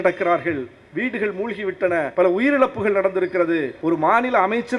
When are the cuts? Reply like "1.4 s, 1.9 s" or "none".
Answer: 2.1 s, 3.7 s